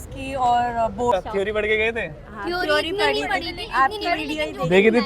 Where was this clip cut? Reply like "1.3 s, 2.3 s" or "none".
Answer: 1.1 s